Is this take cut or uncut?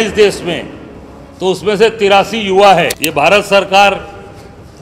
cut